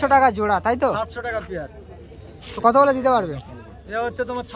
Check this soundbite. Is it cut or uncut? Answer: uncut